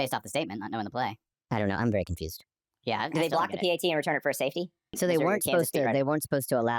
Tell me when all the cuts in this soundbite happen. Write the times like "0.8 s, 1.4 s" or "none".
1.3 s